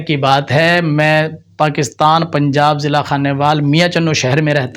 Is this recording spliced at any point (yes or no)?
no